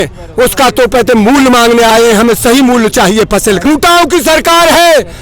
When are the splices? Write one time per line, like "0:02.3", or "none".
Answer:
0:03.6